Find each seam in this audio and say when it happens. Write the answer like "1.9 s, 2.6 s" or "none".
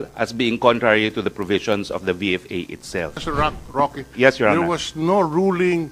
3.2 s